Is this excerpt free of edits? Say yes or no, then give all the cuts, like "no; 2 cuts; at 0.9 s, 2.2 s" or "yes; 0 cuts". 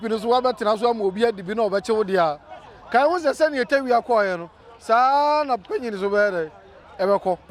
yes; 0 cuts